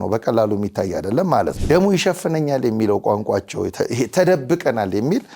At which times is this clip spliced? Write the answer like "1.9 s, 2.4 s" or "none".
1.6 s